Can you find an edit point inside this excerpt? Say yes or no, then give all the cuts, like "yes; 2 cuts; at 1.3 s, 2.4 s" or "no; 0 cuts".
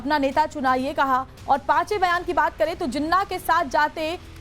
yes; 1 cut; at 1.3 s